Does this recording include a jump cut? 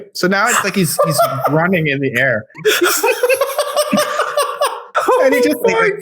yes; 2 cuts; at 2.5 s, 4.8 s

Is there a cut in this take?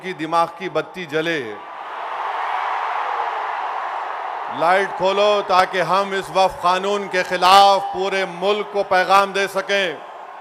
no; 0 cuts

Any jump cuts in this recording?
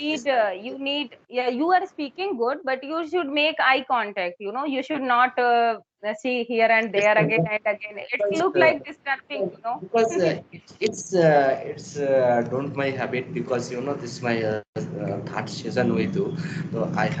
no; 0 cuts

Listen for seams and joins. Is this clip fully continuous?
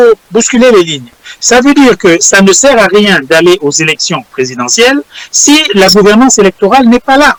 yes; 0 cuts

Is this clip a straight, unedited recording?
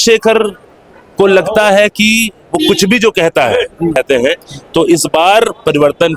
no; 1 cut; at 4.0 s

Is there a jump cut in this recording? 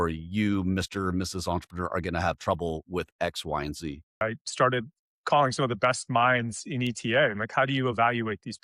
yes; 1 cut; at 4.2 s

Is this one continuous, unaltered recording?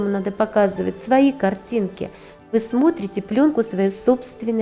no; 1 cut; at 2.5 s

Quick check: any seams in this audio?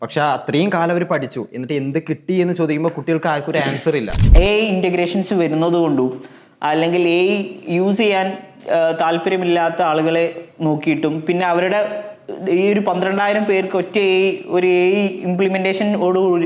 yes; 1 cut; at 4.2 s

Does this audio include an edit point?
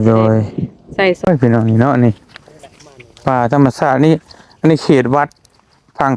yes; 1 cut; at 1.3 s

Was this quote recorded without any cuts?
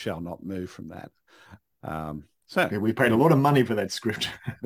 yes; 0 cuts

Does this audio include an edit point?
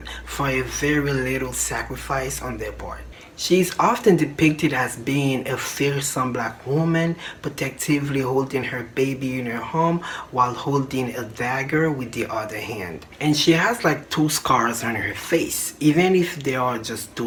no; 0 cuts

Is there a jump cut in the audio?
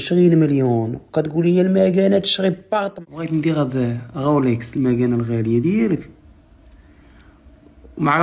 yes; 1 cut; at 2.9 s

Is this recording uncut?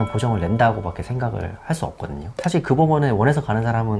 no; 1 cut; at 2.3 s

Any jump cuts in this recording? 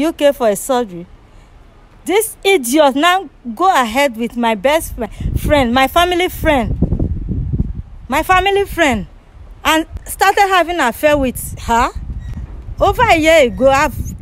no; 0 cuts

